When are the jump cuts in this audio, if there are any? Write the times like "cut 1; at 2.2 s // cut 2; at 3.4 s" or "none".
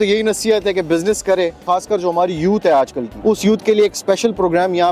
cut 1; at 1.6 s // cut 2; at 3.0 s